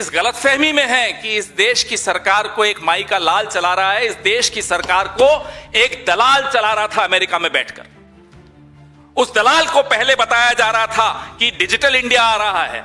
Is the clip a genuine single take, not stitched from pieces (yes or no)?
yes